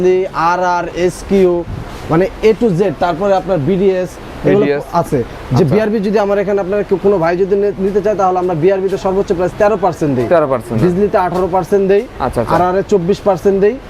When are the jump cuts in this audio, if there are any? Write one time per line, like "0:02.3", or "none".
none